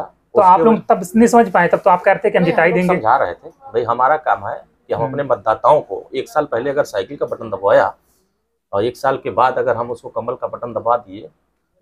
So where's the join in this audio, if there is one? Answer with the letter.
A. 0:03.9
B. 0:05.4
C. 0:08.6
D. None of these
D